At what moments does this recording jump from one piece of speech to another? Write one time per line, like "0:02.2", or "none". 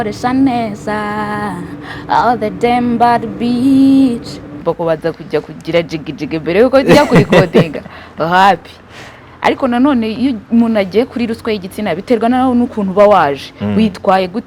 0:04.6